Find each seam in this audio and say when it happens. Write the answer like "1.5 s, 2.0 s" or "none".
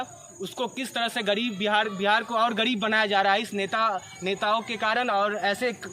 none